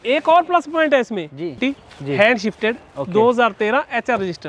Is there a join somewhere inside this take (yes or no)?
yes